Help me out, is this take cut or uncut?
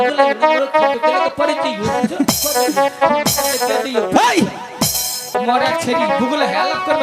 cut